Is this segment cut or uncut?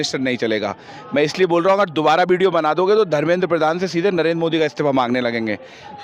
uncut